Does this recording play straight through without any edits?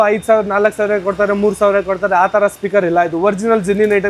yes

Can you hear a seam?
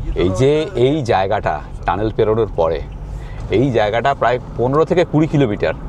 no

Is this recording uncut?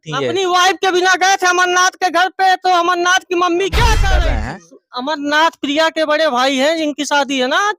no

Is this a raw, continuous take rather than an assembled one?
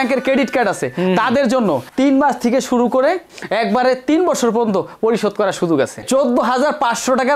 yes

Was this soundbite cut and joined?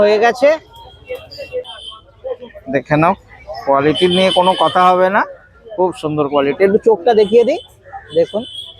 yes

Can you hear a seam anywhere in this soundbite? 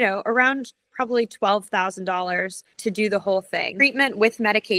yes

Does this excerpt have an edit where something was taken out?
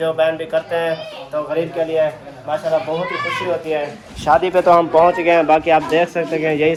no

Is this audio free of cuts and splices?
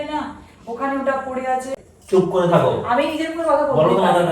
no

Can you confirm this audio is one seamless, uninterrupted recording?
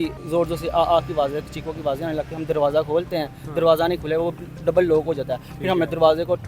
yes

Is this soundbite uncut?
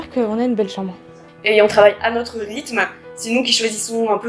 no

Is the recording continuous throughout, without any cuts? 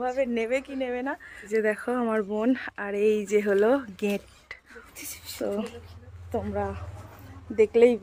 no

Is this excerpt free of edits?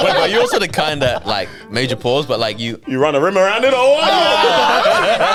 yes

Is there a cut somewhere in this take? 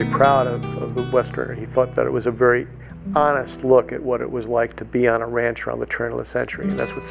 no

